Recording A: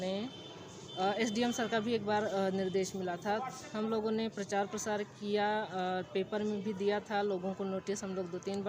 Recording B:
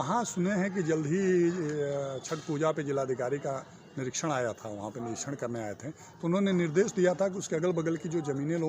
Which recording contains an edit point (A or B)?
B